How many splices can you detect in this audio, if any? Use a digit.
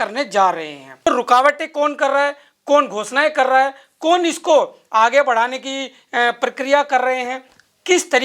1